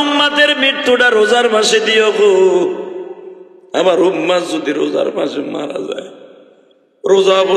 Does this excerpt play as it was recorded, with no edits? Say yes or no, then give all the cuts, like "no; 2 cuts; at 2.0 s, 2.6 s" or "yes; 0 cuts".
yes; 0 cuts